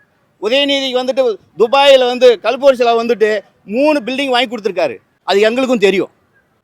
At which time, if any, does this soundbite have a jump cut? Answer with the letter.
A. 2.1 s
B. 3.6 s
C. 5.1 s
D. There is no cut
C